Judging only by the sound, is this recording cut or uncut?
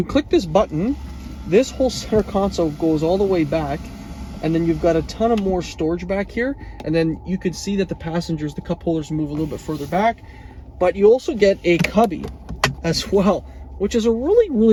uncut